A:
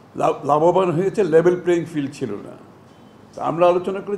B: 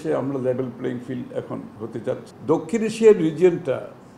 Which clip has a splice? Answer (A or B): B